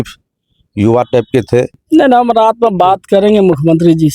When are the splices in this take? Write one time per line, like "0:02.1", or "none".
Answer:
0:01.8